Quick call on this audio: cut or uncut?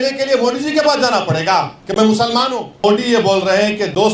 cut